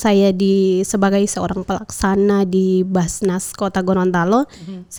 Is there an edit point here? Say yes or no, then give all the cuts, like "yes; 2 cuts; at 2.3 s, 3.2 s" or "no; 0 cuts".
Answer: no; 0 cuts